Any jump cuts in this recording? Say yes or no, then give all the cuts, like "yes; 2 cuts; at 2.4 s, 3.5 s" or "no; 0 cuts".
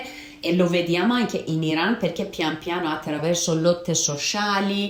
no; 0 cuts